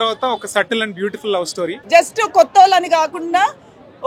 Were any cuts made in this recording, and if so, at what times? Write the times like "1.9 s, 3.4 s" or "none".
1.8 s

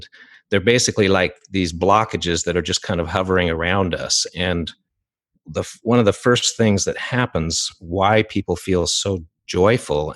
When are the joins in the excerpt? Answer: none

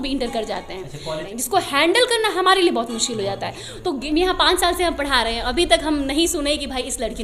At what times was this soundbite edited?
1.3 s, 4.0 s

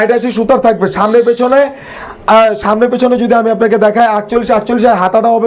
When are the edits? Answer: none

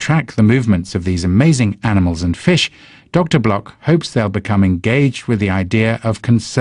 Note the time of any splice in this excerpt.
1.5 s

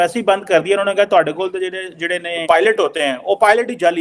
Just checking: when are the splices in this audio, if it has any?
2.3 s

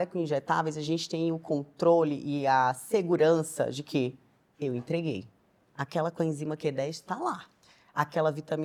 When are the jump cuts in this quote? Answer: none

